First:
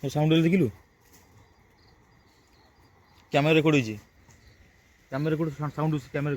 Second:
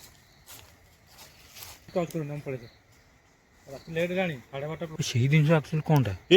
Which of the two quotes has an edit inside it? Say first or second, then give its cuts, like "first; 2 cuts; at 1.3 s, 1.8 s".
second; 2 cuts; at 1.9 s, 4.9 s